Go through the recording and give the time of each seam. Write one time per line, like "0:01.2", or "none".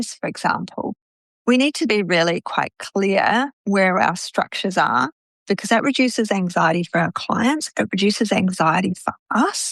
0:01.2